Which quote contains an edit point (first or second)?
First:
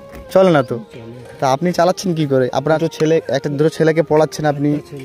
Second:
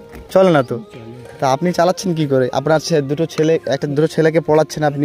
first